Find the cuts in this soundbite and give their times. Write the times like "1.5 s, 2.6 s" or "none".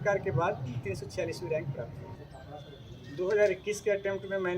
2.1 s